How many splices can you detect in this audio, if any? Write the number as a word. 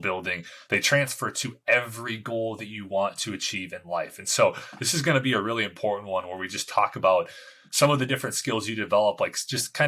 zero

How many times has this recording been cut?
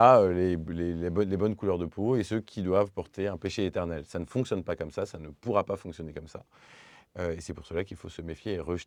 zero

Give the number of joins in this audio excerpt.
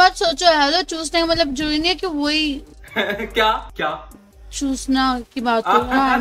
one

